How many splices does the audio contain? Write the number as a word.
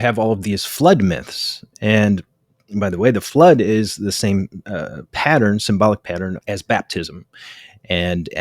one